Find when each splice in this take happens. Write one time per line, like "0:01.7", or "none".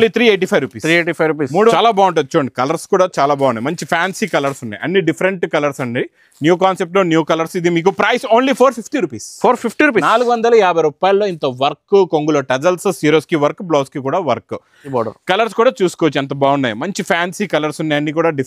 0:01.7
0:14.8